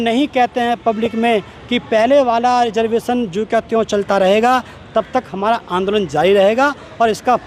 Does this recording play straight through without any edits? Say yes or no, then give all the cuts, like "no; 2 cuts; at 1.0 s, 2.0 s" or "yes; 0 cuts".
yes; 0 cuts